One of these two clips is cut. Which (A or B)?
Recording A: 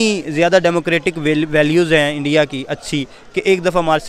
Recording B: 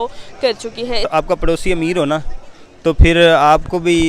B